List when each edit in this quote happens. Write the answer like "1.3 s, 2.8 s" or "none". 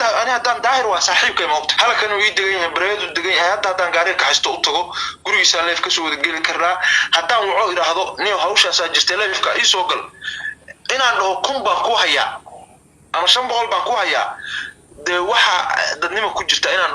1.7 s